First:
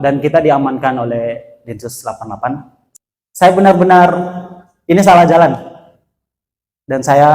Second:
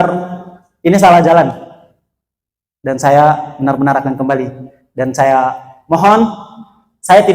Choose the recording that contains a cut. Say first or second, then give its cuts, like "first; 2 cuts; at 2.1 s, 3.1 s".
first; 1 cut; at 2.8 s